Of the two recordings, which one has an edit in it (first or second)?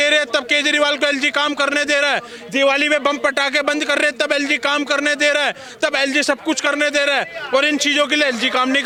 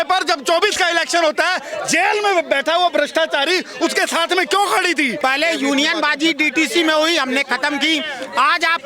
second